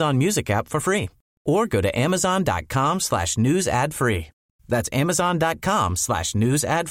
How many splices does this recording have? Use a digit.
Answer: 0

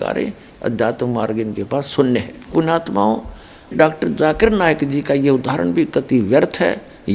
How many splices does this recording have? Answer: 2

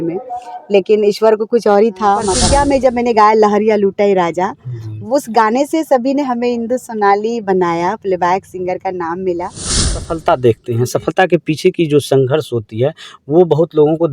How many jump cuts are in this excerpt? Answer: 2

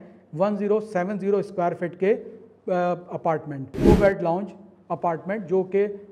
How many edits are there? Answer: 1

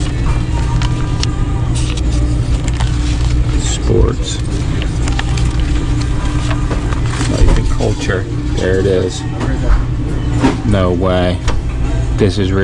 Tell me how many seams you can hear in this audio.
2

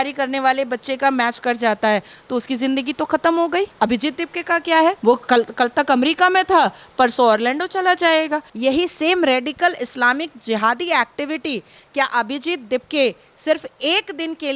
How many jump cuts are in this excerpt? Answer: 3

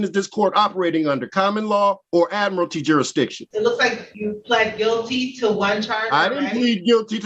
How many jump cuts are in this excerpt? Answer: 3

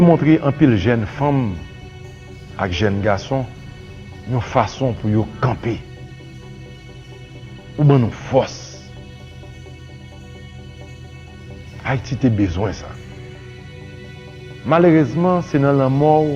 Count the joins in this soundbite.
2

